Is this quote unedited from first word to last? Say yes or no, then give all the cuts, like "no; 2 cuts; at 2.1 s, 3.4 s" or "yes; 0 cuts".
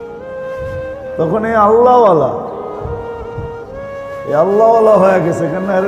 no; 1 cut; at 1.1 s